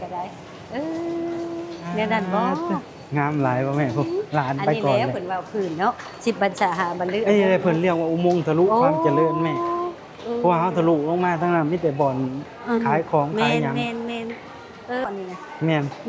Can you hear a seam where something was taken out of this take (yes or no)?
yes